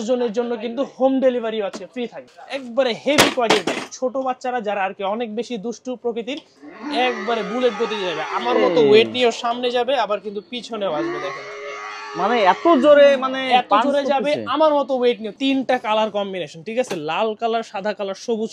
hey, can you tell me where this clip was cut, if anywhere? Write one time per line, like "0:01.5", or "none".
0:02.2
0:06.6
0:15.3